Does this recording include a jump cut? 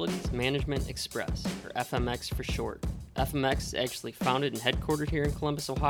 no; 0 cuts

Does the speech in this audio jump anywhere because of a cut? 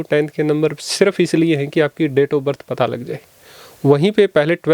no; 0 cuts

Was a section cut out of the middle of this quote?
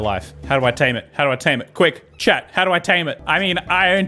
yes; 1 cut; at 3.1 s

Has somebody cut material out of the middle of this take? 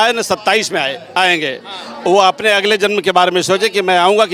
no; 0 cuts

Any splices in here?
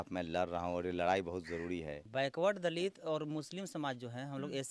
yes; 1 cut; at 2.0 s

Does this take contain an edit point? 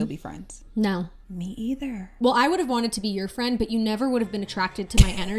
yes; 1 cut; at 2.1 s

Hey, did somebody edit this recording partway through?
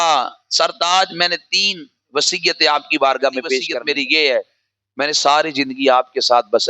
yes; 1 cut; at 3.8 s

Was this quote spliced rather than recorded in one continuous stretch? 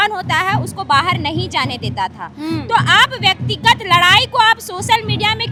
no; 0 cuts

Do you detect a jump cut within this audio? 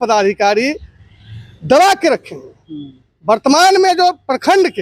no; 0 cuts

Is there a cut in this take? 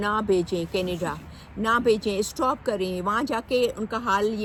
no; 0 cuts

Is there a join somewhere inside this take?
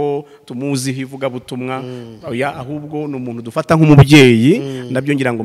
no; 0 cuts

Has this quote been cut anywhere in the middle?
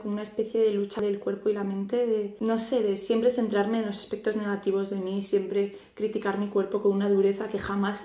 yes; 1 cut; at 6.3 s

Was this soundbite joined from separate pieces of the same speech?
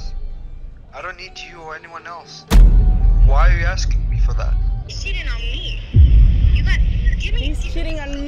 yes; 1 cut; at 4.9 s

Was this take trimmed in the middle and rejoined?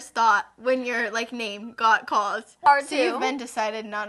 yes; 1 cut; at 2.7 s

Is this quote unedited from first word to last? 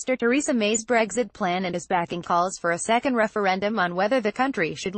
yes; 0 cuts

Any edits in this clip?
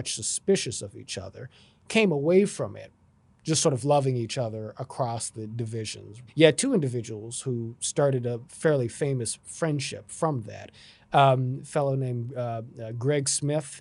yes; 1 cut; at 6.1 s

